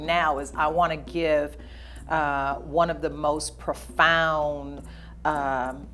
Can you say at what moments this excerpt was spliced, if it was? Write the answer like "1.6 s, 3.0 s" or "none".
none